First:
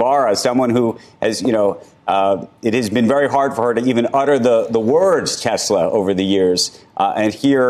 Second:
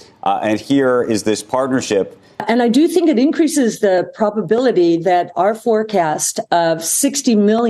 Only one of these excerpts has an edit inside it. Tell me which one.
second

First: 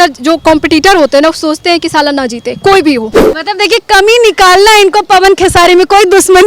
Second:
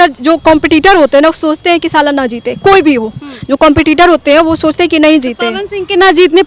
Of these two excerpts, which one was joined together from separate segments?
first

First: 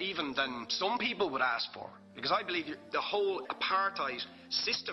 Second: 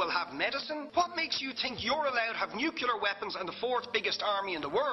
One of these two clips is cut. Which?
first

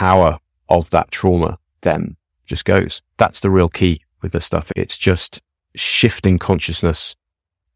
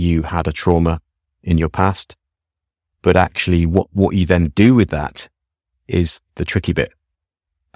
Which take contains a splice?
first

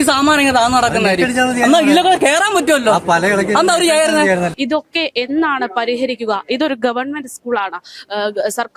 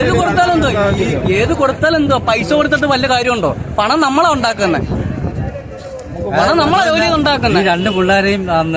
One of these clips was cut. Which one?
first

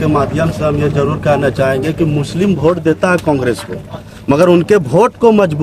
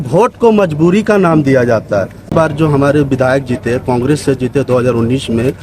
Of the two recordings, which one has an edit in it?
second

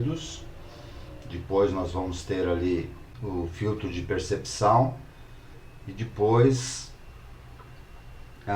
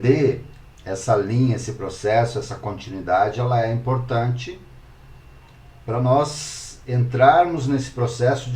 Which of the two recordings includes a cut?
first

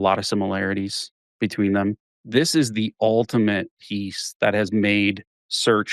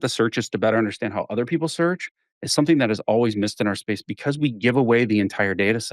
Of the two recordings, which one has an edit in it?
first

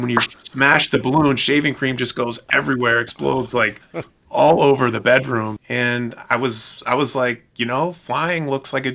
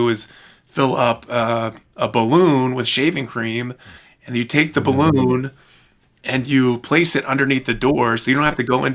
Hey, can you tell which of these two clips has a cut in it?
first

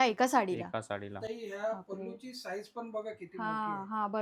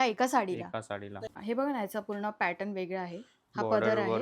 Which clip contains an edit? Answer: second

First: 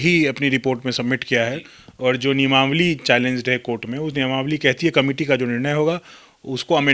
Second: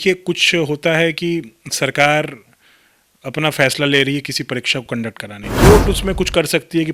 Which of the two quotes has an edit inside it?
second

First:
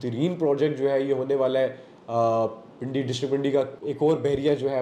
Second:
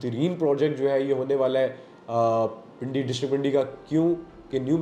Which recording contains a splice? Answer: first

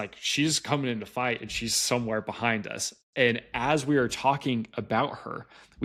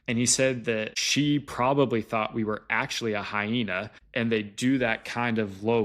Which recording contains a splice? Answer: second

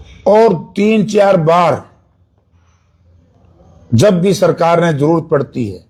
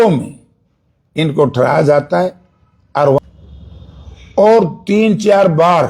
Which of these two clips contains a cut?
second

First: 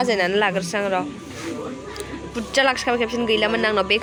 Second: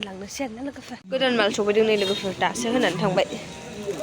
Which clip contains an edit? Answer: second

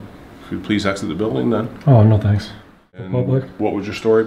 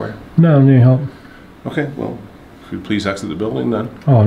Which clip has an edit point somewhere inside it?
first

